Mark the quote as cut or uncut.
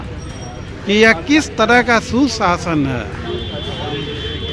uncut